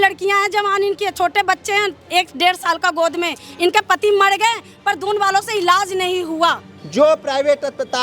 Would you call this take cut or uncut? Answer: cut